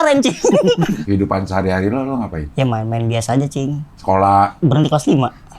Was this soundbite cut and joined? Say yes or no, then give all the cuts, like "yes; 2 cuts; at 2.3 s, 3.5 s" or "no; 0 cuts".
yes; 3 cuts; at 1.0 s, 2.4 s, 4.5 s